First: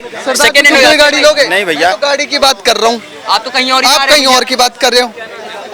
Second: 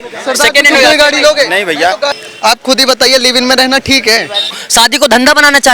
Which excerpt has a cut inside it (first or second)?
second